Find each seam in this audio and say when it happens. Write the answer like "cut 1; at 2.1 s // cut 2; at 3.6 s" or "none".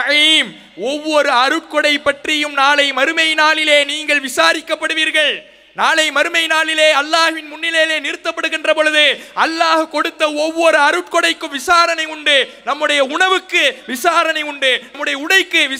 none

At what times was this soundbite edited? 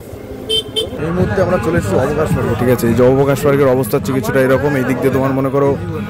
cut 1; at 0.9 s

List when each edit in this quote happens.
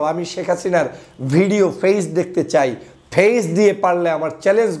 none

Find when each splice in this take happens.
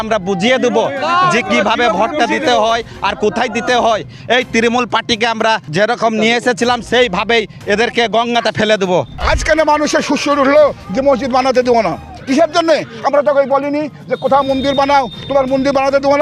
cut 1; at 5.7 s // cut 2; at 9.2 s

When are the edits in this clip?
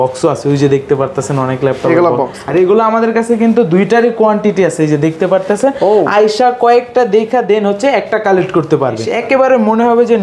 cut 1; at 2.4 s // cut 2; at 9.1 s

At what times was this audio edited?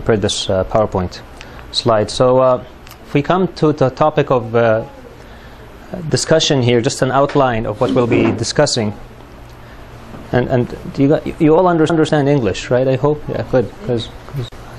cut 1; at 8.9 s

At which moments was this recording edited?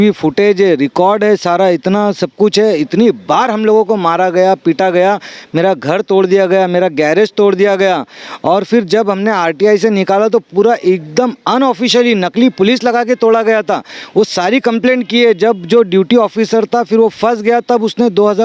none

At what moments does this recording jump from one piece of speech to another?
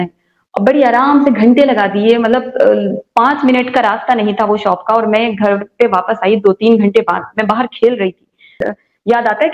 cut 1; at 8.6 s

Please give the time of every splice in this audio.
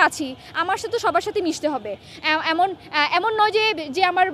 none

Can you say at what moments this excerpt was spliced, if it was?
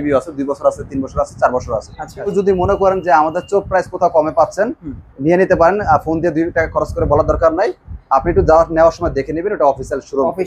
cut 1; at 2.3 s

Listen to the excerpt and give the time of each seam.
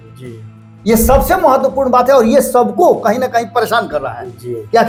none

